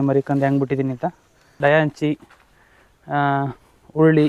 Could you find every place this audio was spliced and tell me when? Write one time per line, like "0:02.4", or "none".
0:01.5